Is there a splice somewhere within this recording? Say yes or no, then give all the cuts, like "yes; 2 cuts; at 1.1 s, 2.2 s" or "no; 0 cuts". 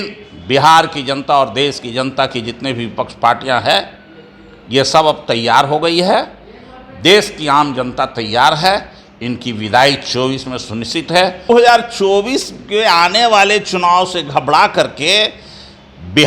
yes; 1 cut; at 11.4 s